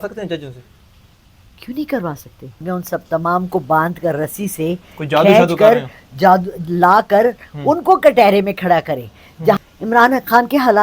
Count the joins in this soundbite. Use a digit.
2